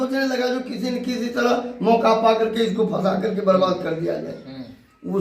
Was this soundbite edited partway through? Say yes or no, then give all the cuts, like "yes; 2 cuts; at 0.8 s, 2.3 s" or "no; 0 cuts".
no; 0 cuts